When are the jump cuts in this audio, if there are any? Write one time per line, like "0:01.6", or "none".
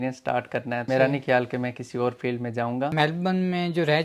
0:00.9
0:02.9